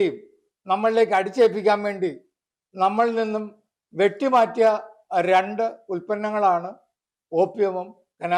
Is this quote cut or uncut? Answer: uncut